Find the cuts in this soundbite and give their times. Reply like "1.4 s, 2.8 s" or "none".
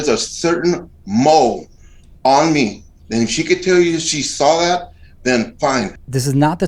none

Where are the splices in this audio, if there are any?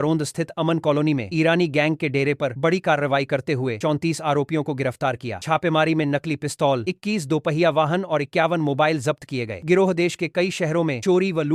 none

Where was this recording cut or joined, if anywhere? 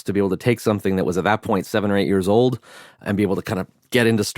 3.0 s

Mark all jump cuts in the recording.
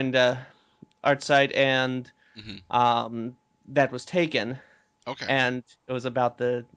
none

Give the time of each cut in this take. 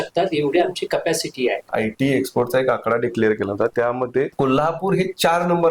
1.7 s, 4.3 s

